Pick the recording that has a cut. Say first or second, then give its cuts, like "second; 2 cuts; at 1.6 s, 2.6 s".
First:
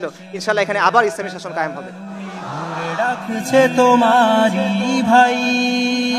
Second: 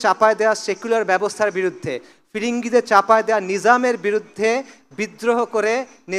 first; 1 cut; at 2.8 s